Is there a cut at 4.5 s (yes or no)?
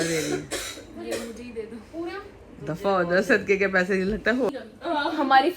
yes